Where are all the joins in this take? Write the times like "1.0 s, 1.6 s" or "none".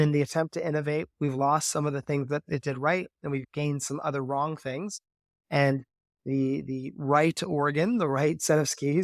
3.4 s